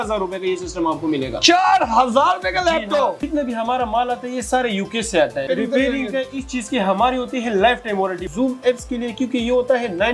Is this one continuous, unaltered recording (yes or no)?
no